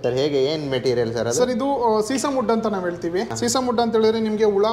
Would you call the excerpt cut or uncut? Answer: uncut